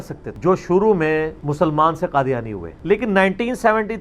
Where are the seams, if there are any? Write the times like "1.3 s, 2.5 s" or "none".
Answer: none